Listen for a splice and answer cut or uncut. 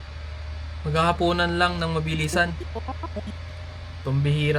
uncut